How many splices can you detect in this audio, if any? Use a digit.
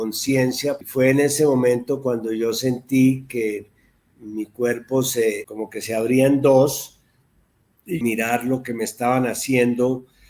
3